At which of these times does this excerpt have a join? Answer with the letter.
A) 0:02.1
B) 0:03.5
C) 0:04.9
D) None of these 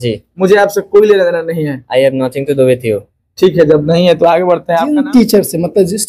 C